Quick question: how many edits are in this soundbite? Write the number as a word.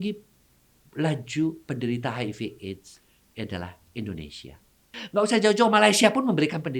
one